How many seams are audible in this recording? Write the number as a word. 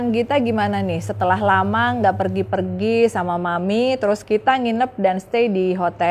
one